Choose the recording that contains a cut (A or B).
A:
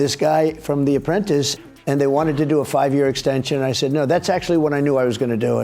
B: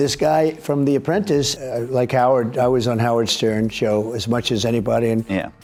A